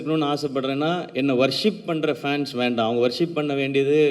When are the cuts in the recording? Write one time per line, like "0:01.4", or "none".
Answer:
none